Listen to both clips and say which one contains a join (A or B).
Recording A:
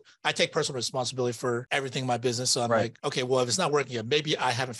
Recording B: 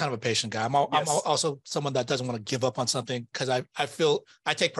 A